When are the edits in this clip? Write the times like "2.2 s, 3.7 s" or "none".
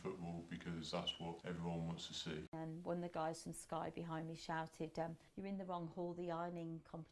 2.5 s, 5.2 s

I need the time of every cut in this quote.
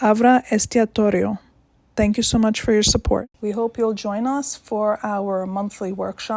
3.3 s

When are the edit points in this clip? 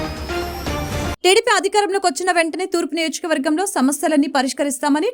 none

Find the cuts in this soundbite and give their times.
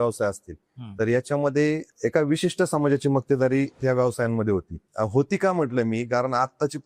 4.8 s

